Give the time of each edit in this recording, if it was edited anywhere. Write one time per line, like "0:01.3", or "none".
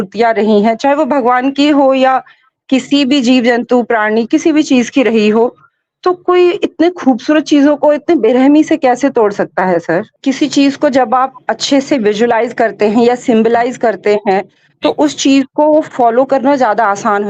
0:10.1